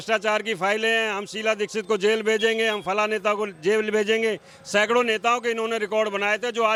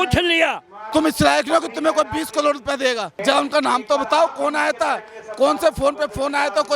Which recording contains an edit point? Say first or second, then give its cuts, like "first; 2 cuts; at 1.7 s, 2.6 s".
second; 2 cuts; at 0.9 s, 3.1 s